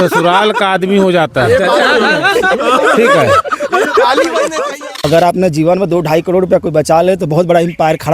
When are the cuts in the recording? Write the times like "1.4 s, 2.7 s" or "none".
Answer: 5.0 s